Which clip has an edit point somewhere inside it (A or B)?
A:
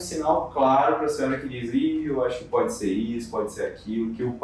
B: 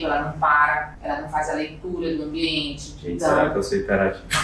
B